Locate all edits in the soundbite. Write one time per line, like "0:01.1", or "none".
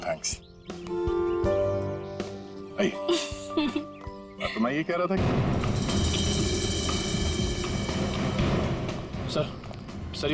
0:05.2